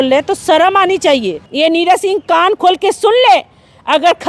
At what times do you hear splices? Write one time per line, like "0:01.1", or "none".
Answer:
0:01.4